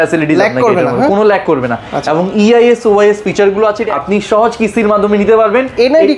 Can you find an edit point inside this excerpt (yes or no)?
yes